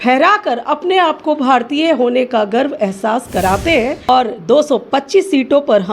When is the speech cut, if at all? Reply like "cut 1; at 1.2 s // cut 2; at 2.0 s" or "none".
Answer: cut 1; at 4.1 s